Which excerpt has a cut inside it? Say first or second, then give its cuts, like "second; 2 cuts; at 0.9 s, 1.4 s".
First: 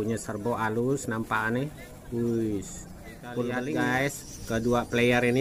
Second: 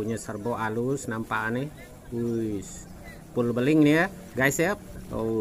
first; 1 cut; at 3.6 s